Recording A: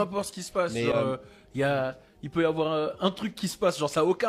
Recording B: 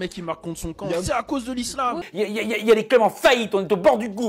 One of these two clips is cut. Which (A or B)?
B